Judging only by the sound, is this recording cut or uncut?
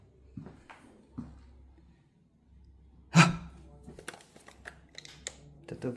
uncut